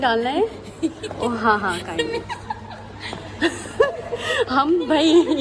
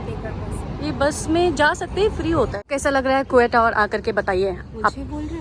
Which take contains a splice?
second; 1 cut; at 2.7 s

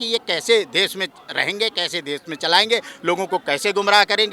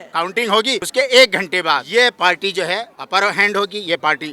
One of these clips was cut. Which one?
second; 3 cuts; at 0.9 s, 1.8 s, 3.0 s

